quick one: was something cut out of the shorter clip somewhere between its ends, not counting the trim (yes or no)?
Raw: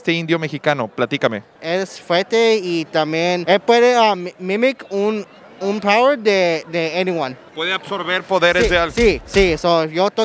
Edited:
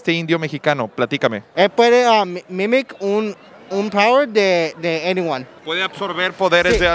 yes